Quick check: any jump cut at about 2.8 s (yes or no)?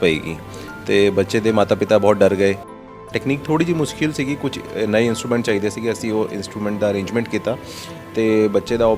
yes